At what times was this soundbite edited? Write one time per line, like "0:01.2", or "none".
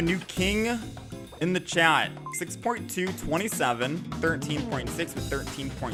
none